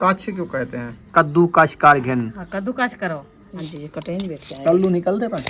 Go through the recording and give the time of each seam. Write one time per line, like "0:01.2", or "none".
0:01.1
0:03.5